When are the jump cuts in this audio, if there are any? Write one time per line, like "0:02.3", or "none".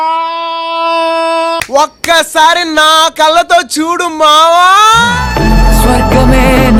none